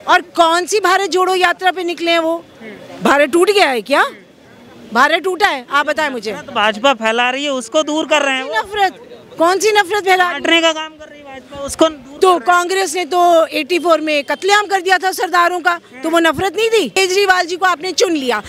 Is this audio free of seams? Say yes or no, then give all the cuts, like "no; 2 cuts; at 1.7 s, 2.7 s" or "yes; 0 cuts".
no; 1 cut; at 17.0 s